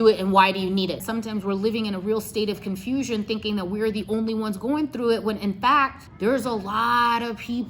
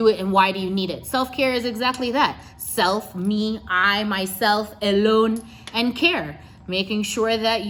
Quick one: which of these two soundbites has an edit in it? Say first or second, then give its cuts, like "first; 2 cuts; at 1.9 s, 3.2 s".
first; 2 cuts; at 1.0 s, 6.0 s